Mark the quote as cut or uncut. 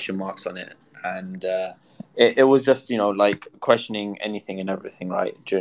uncut